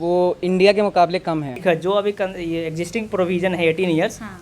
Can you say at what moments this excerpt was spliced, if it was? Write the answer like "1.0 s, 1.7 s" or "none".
1.5 s